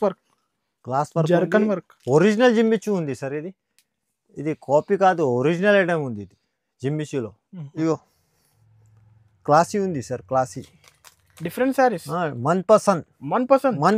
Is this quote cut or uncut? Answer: cut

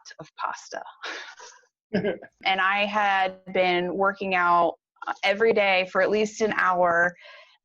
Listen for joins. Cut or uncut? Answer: cut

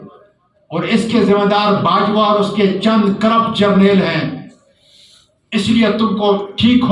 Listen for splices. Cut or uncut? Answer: uncut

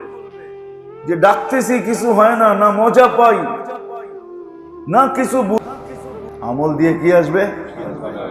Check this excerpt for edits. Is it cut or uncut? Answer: uncut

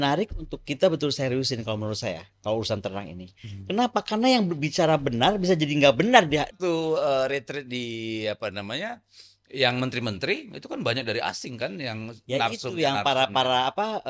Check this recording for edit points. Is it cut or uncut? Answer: cut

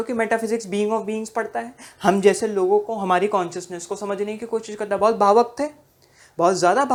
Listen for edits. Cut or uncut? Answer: uncut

